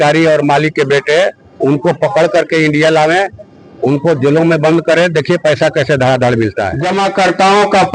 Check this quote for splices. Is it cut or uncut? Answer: cut